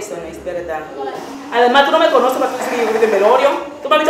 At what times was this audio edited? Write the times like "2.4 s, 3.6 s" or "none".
1.2 s